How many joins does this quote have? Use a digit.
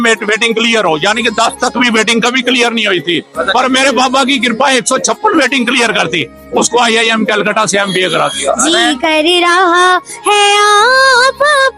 1